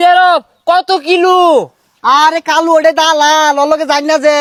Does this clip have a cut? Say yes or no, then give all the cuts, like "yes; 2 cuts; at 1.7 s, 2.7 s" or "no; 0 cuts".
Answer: no; 0 cuts